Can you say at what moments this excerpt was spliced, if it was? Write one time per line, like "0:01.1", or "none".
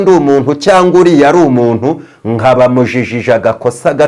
none